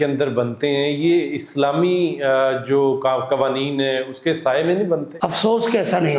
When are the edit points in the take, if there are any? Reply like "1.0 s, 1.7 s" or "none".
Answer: 5.1 s